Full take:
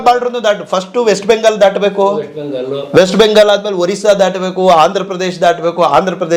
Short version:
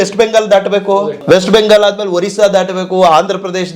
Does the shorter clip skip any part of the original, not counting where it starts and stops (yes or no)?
yes